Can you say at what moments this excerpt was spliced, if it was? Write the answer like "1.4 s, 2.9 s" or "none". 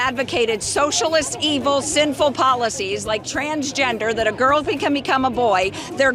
none